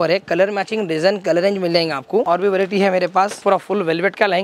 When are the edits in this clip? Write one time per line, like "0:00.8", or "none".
0:02.3
0:03.4